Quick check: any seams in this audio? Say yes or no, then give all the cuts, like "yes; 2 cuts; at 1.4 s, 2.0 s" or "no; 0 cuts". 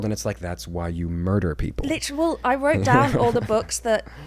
no; 0 cuts